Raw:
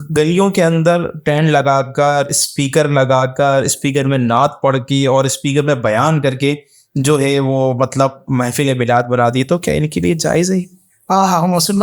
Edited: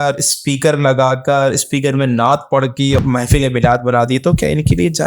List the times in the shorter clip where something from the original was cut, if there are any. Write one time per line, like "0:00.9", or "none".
0:03.0